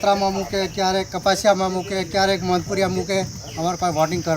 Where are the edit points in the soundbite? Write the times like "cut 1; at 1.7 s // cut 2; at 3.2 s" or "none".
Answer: cut 1; at 3.4 s